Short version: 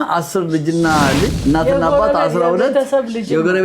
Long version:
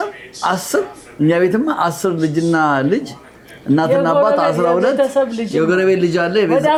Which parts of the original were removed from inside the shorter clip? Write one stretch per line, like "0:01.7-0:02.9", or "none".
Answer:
0:03.0-0:03.6